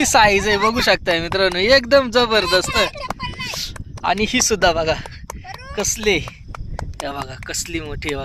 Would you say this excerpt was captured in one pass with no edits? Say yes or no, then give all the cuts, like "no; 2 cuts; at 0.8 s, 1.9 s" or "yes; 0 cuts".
yes; 0 cuts